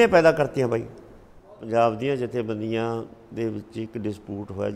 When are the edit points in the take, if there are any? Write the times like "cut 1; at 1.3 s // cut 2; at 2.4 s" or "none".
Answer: cut 1; at 1.6 s

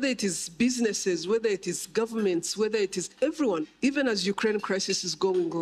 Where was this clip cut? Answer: cut 1; at 3.6 s

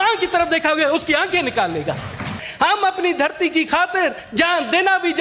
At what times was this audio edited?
cut 1; at 2.4 s // cut 2; at 4.2 s

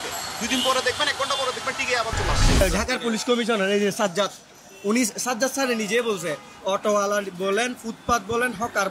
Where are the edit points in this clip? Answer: cut 1; at 2.6 s

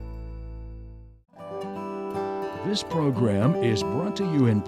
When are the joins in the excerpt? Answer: cut 1; at 1.5 s // cut 2; at 2.6 s

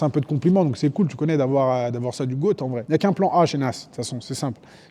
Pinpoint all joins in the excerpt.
cut 1; at 2.8 s

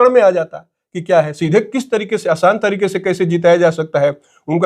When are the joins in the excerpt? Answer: none

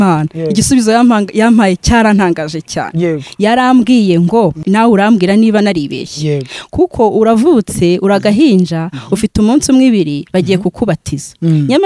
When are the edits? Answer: cut 1; at 4.6 s

